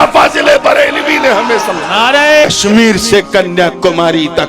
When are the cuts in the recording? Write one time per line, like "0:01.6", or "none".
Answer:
0:02.5